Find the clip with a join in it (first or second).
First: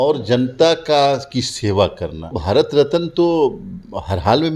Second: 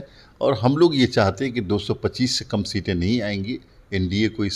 first